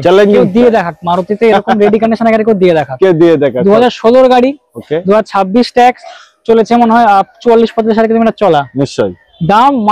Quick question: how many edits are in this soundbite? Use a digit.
0